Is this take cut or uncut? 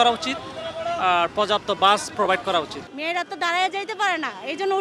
cut